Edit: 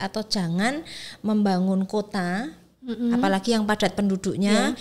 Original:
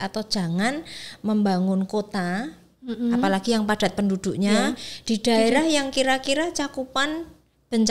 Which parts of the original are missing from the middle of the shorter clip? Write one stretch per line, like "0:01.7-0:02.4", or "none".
none